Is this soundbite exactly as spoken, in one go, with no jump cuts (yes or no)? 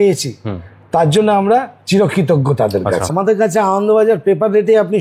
no